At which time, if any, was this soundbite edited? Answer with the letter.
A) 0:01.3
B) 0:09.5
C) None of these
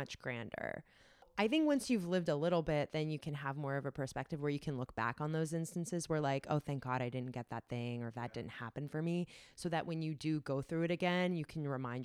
A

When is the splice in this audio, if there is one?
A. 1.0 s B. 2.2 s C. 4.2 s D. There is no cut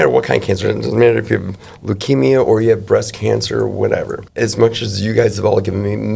C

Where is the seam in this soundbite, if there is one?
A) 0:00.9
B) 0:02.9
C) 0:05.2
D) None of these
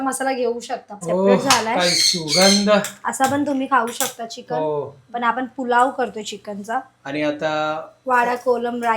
A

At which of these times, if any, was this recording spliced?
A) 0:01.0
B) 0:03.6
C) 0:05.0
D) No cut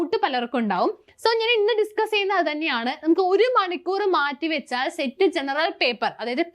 D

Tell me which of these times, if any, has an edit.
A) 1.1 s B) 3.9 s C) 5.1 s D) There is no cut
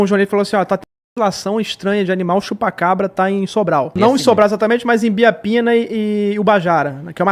B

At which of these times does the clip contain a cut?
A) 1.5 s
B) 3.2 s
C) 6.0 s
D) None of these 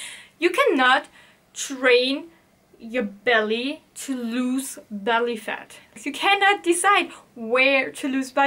C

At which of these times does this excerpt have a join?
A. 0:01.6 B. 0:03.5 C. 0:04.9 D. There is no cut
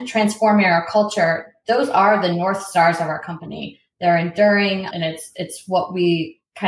C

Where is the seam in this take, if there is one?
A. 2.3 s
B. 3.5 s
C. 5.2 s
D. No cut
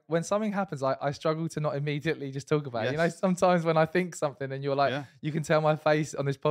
D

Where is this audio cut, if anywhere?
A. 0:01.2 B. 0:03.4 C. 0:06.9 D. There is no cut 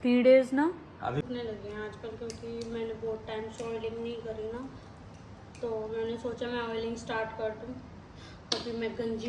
A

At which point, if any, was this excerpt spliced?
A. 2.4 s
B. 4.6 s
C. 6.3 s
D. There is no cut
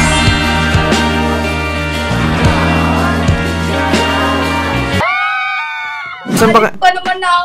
C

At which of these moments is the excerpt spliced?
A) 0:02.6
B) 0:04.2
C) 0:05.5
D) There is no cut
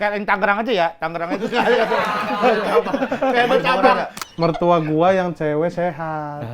B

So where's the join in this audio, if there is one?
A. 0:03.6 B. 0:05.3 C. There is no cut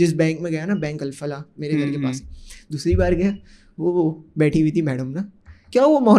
C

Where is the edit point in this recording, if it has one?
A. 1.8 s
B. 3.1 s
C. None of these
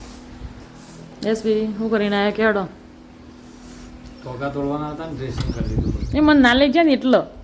C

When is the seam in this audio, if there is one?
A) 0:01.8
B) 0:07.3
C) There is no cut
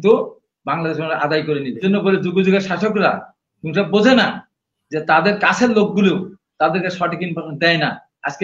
A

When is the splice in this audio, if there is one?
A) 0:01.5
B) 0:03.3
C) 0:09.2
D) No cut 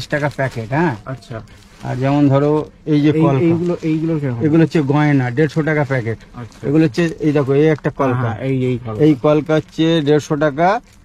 D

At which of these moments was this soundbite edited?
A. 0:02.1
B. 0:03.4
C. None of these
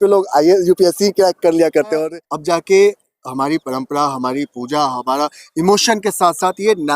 A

